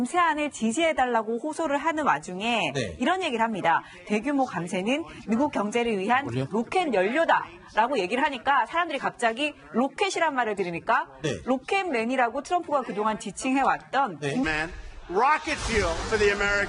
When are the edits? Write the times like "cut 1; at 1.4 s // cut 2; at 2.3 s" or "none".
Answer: none